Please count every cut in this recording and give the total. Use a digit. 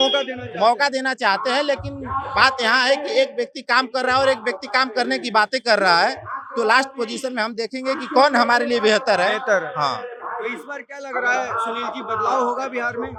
0